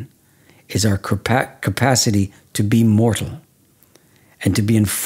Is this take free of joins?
yes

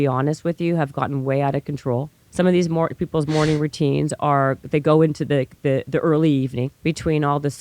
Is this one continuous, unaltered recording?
no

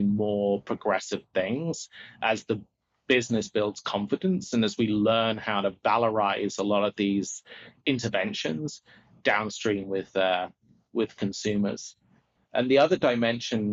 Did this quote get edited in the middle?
no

